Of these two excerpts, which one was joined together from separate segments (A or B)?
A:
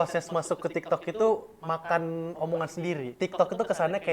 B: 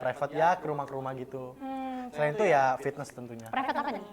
A